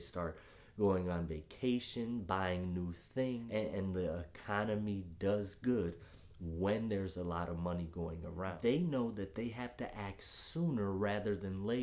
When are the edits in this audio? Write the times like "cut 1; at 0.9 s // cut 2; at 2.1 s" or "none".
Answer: cut 1; at 3.4 s // cut 2; at 8.5 s